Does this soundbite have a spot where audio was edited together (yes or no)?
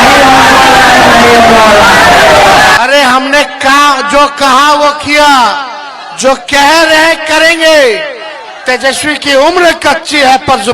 yes